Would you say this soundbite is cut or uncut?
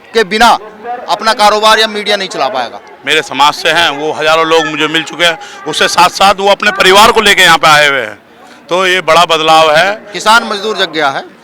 cut